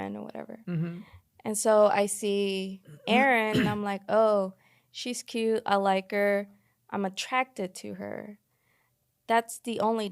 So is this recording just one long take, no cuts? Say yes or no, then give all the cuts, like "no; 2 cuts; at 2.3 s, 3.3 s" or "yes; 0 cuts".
yes; 0 cuts